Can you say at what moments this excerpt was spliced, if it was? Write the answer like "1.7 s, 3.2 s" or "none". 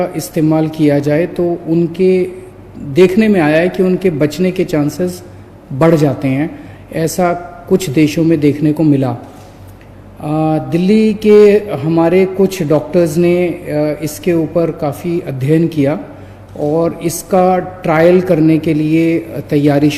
none